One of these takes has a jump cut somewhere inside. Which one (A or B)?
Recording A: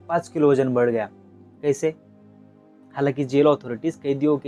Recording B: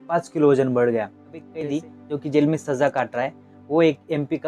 B